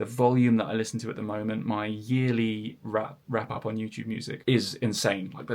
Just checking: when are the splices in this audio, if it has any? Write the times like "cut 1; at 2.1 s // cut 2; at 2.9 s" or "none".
cut 1; at 4.4 s